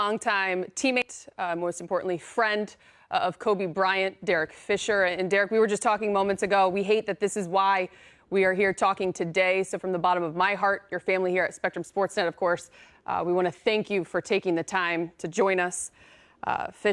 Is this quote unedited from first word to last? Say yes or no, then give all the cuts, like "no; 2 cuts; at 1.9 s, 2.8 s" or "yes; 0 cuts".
no; 1 cut; at 1.2 s